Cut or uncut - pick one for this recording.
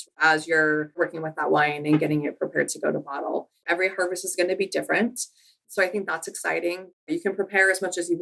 cut